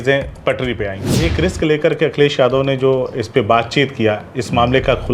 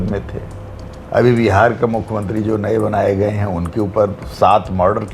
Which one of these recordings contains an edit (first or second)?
first